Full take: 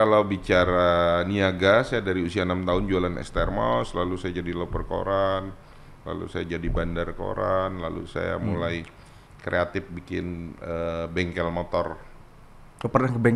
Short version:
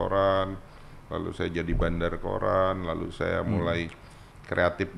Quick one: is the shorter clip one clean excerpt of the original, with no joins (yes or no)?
yes